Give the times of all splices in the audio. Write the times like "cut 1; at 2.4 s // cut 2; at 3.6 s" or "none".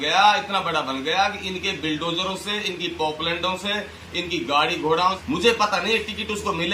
cut 1; at 5.2 s